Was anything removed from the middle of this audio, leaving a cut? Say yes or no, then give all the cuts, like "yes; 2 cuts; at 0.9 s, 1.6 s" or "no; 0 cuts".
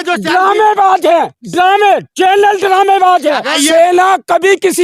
yes; 1 cut; at 3.5 s